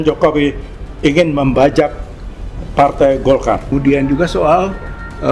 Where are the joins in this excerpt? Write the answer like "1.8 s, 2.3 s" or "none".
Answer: 3.7 s